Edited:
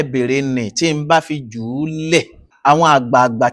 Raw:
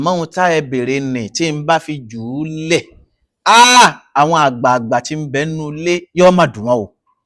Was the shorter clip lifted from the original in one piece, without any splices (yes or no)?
no